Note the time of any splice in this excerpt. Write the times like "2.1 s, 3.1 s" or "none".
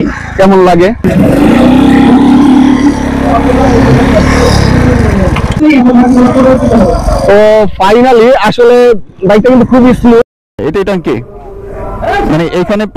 1.1 s, 5.6 s, 10.4 s

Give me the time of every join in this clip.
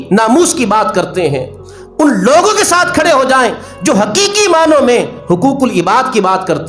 none

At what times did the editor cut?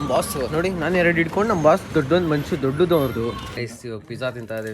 3.7 s

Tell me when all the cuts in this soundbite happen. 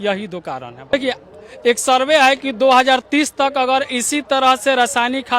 0.9 s

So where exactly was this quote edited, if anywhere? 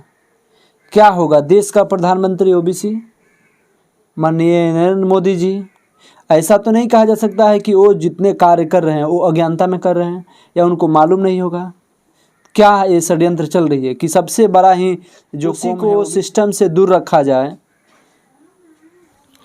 15.6 s

